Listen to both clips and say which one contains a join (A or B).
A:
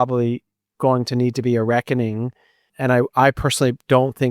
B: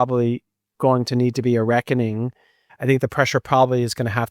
B